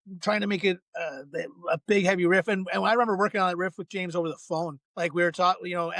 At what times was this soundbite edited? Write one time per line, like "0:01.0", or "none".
0:04.8